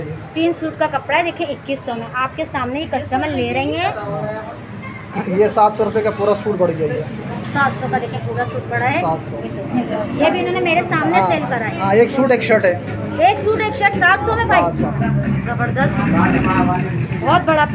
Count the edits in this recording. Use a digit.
2